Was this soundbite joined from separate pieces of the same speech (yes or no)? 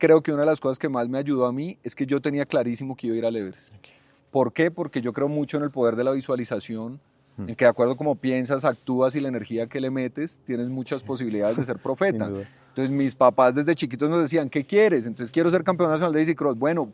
no